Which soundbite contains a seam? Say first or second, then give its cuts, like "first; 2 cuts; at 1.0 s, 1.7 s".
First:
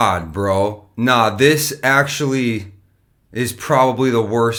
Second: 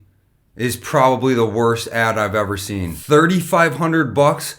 second; 1 cut; at 3.0 s